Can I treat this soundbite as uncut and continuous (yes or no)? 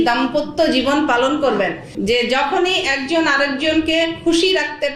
no